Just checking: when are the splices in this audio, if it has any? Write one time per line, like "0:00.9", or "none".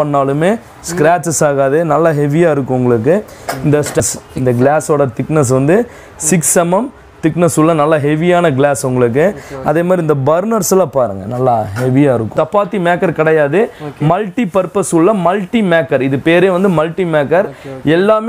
0:04.0
0:12.3